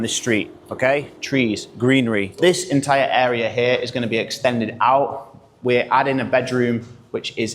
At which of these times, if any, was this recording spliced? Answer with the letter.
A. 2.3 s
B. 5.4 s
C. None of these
A